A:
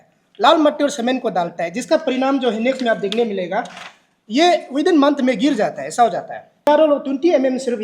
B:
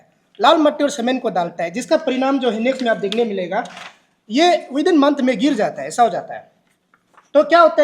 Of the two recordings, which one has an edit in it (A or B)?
A